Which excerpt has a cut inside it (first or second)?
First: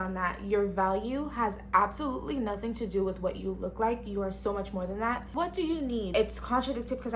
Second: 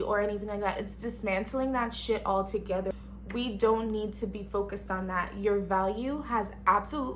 first